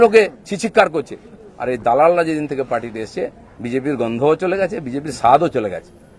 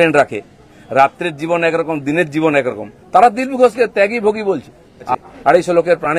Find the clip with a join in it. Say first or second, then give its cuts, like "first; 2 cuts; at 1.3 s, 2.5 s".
second; 1 cut; at 5.2 s